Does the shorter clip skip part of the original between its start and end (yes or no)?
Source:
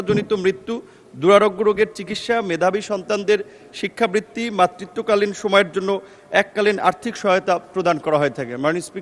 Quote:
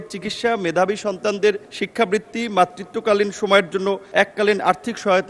yes